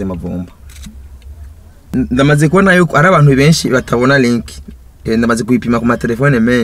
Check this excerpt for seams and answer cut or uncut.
cut